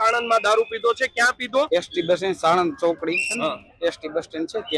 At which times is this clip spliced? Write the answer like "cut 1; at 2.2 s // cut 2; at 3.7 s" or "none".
cut 1; at 1.7 s